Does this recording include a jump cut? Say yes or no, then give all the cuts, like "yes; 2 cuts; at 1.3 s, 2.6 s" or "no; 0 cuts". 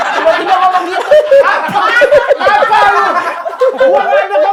no; 0 cuts